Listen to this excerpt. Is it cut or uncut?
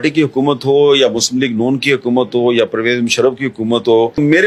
uncut